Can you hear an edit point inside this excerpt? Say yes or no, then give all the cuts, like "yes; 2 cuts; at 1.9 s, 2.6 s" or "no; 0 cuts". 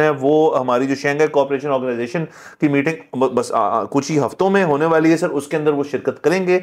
no; 0 cuts